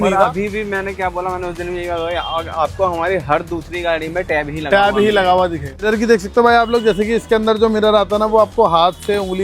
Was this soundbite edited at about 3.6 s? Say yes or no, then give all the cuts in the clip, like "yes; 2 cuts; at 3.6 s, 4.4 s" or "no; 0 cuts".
no; 1 cut; at 5.7 s